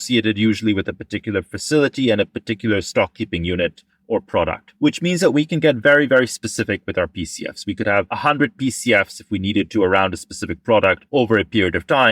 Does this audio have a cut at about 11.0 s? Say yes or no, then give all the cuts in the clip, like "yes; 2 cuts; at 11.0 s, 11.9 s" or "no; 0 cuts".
yes; 3 cuts; at 4.6 s, 8.1 s, 11.0 s